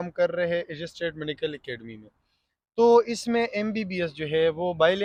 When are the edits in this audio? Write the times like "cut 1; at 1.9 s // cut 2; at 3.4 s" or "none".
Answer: none